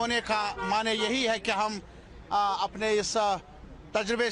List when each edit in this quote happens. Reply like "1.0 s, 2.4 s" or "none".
none

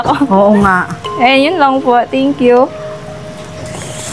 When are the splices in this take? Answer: none

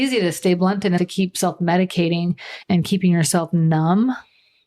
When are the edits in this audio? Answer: 1.0 s, 2.6 s

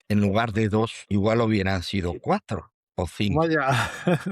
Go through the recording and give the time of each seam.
1.0 s

